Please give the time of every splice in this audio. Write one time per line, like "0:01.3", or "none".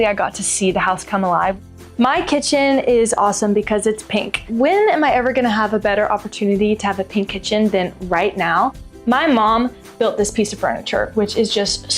0:01.7
0:04.5
0:08.9